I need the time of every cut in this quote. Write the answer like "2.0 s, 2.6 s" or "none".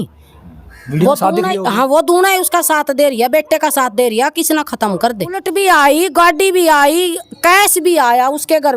5.4 s